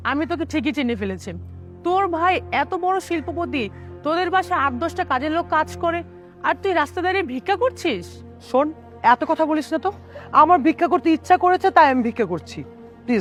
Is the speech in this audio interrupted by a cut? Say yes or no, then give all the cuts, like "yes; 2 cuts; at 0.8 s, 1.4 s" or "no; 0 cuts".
no; 0 cuts